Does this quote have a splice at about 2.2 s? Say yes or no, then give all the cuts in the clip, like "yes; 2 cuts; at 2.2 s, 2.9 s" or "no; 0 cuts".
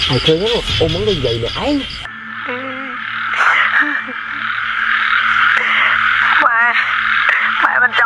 yes; 1 cut; at 2.2 s